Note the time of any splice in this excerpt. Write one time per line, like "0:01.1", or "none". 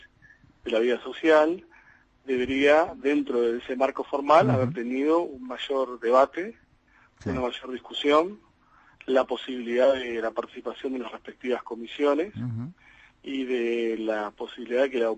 none

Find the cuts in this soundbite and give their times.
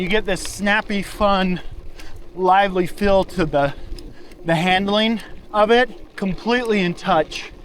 0:06.0

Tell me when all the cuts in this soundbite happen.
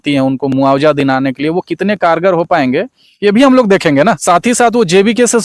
0:04.2

